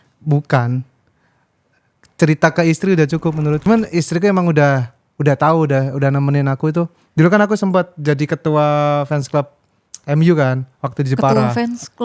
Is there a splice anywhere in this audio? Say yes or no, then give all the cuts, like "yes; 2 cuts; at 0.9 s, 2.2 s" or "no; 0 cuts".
yes; 1 cut; at 3.7 s